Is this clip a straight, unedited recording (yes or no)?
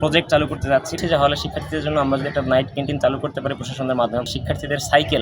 no